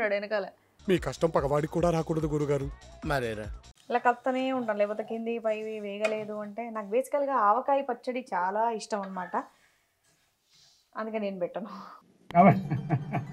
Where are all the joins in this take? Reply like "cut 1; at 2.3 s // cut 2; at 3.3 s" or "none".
cut 1; at 3.7 s